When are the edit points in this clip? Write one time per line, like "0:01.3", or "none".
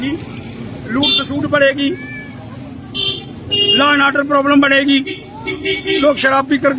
none